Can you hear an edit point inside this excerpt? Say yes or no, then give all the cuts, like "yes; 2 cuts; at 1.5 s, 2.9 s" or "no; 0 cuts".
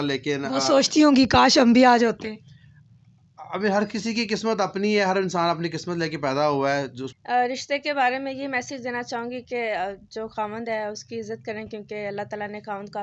yes; 1 cut; at 7.0 s